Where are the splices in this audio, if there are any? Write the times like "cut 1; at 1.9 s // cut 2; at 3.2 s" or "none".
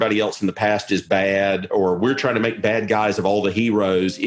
cut 1; at 1.7 s